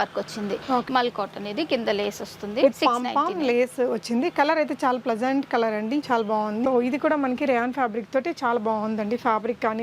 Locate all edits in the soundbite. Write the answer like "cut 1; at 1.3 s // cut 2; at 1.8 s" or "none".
cut 1; at 0.8 s // cut 2; at 6.6 s